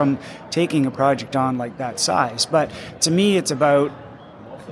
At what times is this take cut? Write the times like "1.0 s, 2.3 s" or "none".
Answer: none